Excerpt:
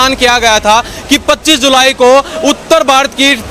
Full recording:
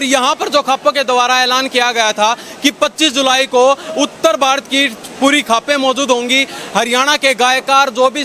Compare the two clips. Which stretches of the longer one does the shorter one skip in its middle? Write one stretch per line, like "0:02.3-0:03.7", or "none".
none